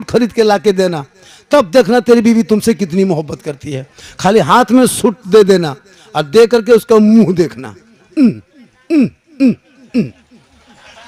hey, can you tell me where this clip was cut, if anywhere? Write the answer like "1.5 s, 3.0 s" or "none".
none